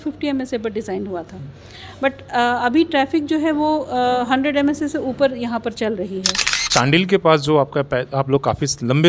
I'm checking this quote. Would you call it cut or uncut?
cut